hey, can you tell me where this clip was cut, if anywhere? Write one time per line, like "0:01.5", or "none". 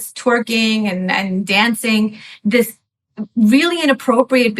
0:02.3